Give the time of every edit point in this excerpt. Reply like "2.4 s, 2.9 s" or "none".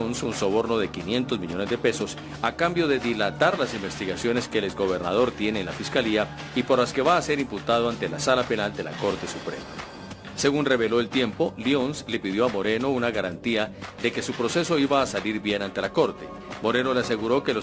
none